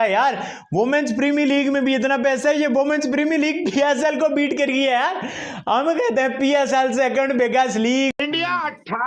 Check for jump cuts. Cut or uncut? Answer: cut